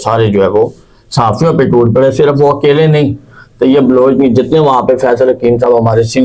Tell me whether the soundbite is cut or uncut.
uncut